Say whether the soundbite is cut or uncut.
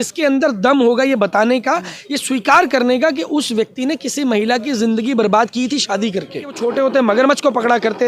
cut